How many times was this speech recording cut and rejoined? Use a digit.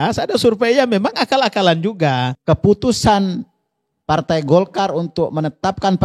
1